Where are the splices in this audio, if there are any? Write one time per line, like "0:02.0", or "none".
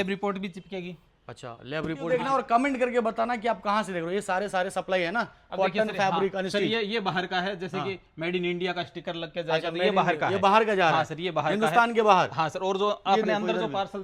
0:02.1

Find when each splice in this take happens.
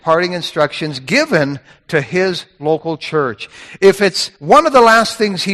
0:04.3

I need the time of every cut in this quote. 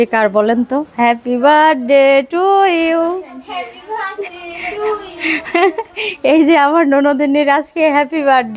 none

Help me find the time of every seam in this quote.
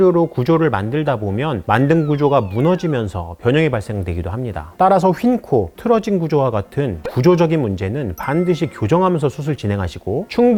none

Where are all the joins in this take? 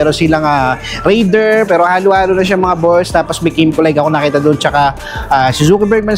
none

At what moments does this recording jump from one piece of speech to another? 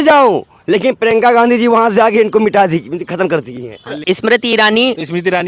0:04.0

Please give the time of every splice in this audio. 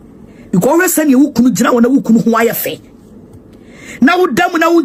none

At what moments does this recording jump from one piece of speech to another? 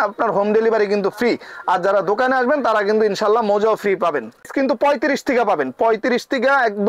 0:04.5

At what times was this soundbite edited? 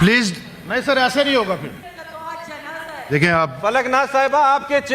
0:01.8

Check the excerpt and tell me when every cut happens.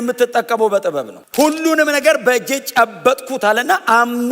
0:01.1

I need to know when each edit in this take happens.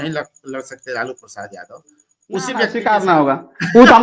0:02.8

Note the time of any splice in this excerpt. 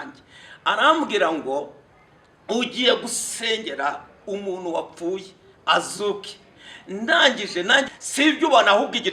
0:07.9

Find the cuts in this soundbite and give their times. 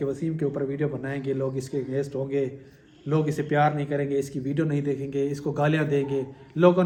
none

